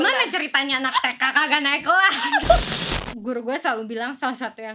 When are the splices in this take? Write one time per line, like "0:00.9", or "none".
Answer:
0:02.8

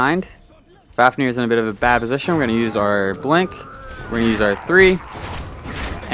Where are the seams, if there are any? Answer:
0:01.8

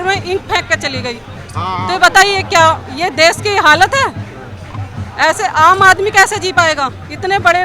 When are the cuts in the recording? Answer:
none

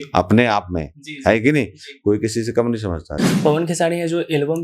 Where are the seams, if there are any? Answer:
0:03.2

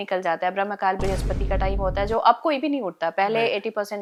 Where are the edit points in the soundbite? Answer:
none

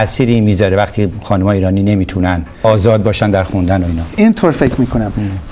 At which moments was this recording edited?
0:02.6

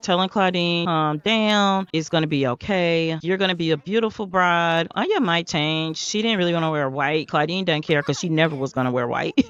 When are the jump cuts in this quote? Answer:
none

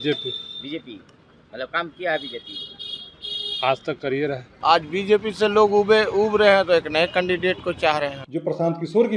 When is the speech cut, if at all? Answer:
0:04.5
0:08.2

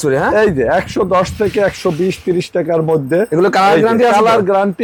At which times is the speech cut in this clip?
none

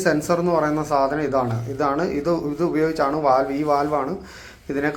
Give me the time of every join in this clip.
none

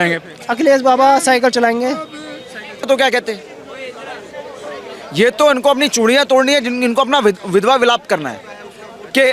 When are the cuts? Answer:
0:02.9

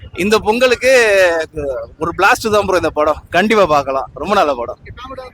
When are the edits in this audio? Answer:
none

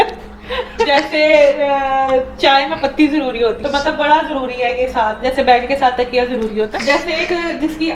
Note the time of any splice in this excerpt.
0:00.8
0:03.6
0:06.7

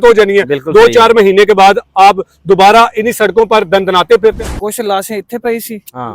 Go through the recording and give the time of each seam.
0:04.3

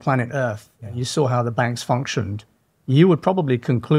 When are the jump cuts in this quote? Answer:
none

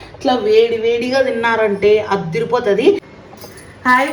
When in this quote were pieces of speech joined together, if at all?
0:03.1

